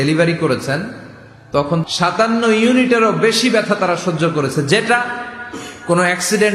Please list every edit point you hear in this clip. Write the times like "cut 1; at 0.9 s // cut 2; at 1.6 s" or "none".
cut 1; at 1.8 s